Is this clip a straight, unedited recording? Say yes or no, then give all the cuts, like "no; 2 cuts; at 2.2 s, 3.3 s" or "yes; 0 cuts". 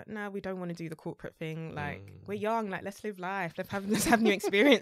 yes; 0 cuts